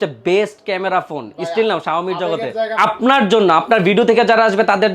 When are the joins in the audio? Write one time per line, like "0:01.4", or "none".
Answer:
0:02.8